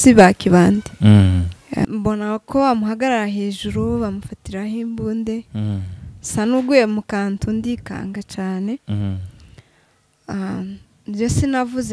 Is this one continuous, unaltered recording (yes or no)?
no